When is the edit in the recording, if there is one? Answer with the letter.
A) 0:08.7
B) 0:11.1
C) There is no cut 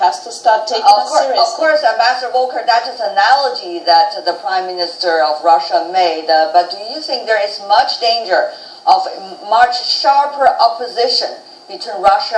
C